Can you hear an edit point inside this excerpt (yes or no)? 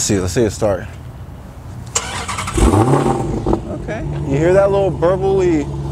no